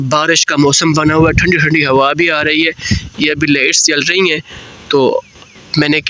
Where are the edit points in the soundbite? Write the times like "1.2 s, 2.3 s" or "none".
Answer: none